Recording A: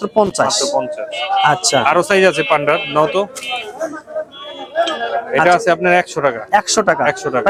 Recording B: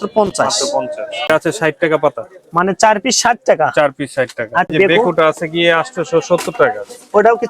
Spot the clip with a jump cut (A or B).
B